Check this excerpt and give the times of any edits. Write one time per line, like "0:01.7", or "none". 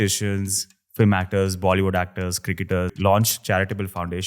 0:02.9